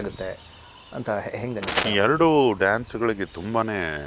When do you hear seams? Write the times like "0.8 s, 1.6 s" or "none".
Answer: 1.7 s